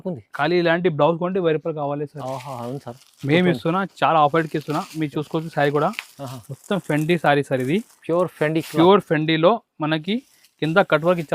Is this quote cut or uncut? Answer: uncut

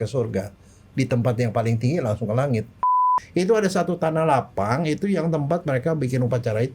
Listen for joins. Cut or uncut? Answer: cut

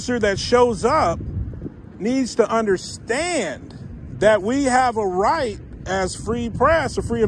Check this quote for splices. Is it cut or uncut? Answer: uncut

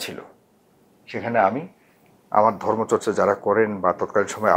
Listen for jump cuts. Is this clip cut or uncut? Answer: uncut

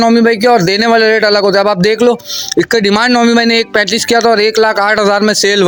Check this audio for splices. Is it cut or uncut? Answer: uncut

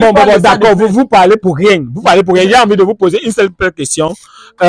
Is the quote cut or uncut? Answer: uncut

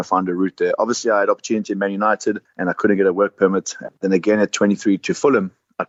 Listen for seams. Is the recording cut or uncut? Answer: uncut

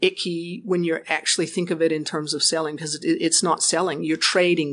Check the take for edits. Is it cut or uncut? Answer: uncut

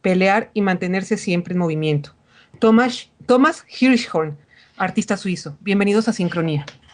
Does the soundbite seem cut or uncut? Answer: cut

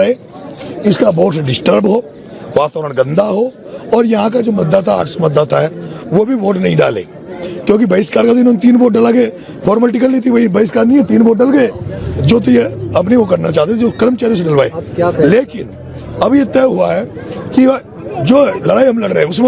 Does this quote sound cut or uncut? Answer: uncut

